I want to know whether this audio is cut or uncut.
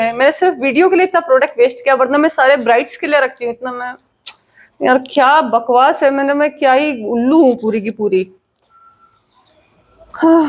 uncut